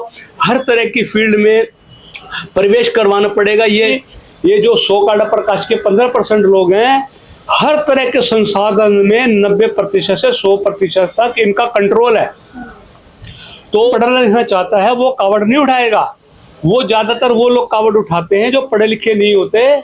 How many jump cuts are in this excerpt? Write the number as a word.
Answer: two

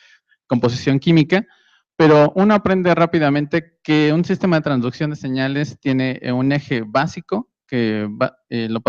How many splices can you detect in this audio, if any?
one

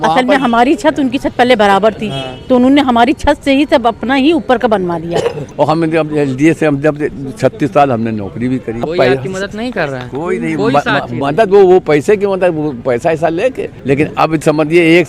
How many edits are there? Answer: three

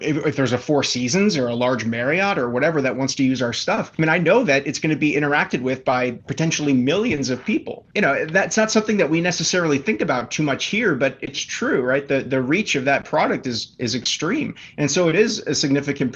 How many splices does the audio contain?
zero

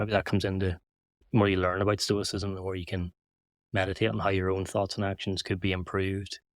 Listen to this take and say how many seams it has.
one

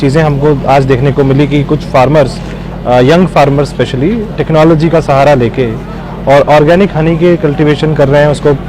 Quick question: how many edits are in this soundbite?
zero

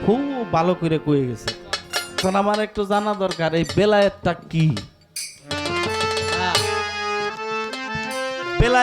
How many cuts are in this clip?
one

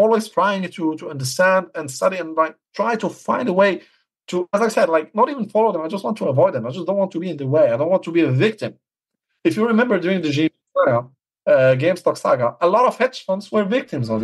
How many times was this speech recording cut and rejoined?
zero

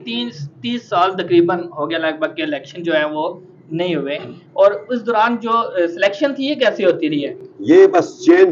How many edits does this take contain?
zero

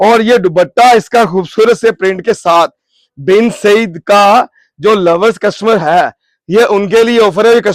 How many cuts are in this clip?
zero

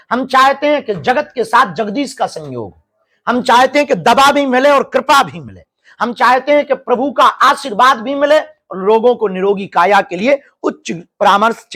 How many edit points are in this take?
zero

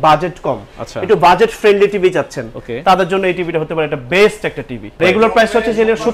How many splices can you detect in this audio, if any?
one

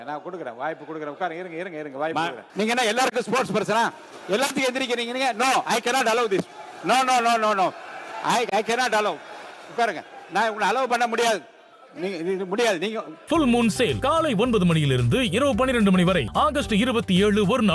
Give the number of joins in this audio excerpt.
two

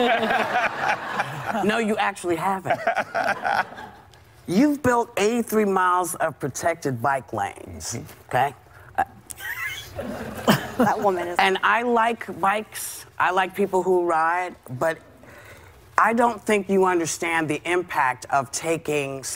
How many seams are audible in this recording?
one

